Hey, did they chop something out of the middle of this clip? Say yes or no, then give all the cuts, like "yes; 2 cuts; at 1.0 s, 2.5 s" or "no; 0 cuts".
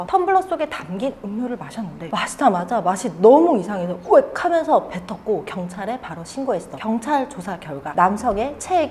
no; 0 cuts